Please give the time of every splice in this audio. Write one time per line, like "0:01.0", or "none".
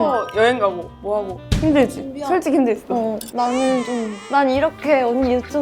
0:01.4
0:03.2
0:04.2